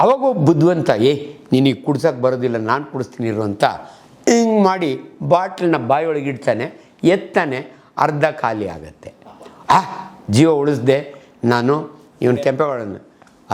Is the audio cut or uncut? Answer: uncut